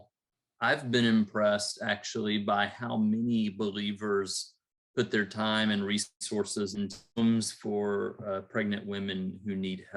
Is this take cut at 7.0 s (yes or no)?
yes